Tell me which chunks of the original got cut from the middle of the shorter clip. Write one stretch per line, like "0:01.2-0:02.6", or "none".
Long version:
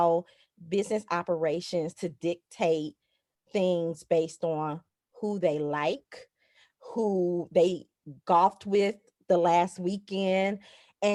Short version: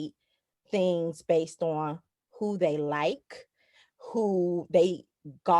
none